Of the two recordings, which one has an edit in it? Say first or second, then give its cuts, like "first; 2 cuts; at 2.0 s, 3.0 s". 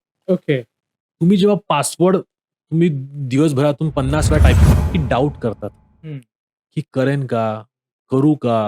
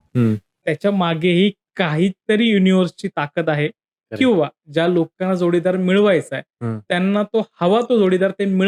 first; 1 cut; at 4.6 s